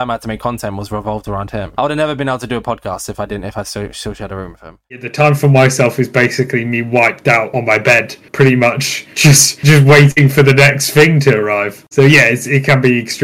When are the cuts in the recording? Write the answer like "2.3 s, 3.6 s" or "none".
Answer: 5.0 s